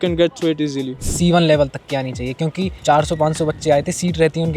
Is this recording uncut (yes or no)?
no